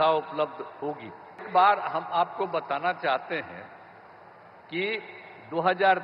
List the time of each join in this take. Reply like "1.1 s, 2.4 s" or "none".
1.5 s